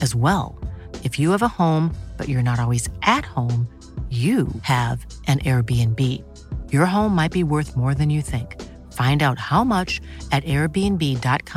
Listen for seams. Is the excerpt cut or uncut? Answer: uncut